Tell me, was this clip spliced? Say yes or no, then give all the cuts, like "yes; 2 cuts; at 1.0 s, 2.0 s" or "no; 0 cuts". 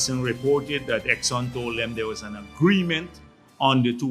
no; 0 cuts